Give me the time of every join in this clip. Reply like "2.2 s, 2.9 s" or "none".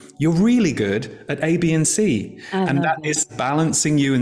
3.3 s